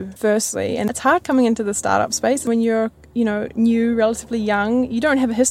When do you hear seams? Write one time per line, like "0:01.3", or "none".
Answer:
0:00.9
0:02.5

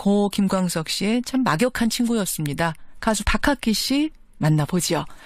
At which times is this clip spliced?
0:03.4

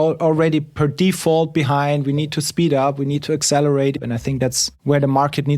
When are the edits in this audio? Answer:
0:04.7

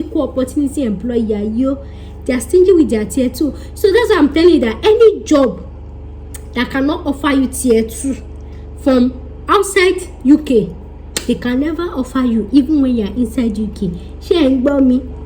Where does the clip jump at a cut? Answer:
none

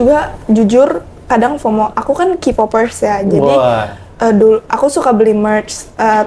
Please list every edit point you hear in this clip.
none

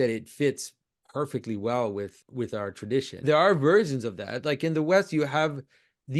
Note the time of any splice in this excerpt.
0:02.2
0:03.2

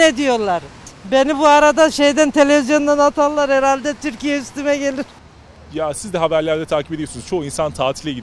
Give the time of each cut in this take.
0:00.8
0:05.1

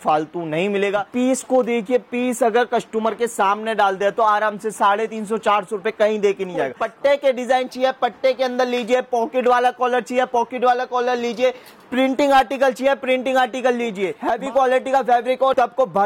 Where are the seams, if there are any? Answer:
0:01.1
0:06.8
0:14.2

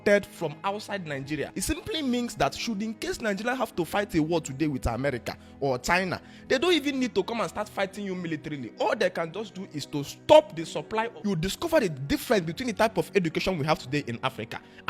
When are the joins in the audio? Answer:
0:01.5
0:11.1

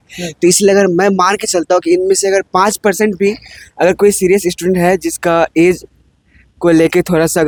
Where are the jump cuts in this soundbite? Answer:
none

